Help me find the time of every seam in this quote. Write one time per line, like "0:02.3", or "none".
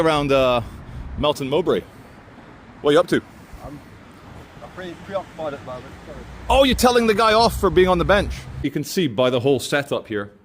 0:08.6

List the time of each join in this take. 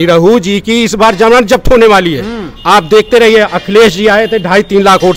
none

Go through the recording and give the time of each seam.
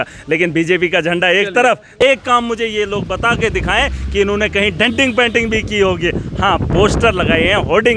0:02.0

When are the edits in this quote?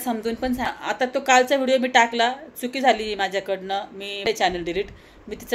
0:00.9
0:04.2

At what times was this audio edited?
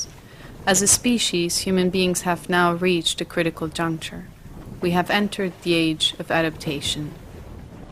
0:03.2

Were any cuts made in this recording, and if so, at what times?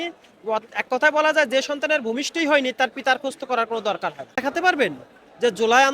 0:04.4

